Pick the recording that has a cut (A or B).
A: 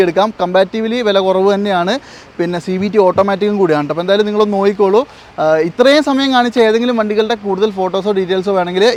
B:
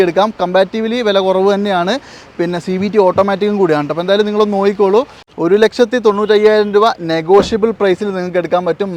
B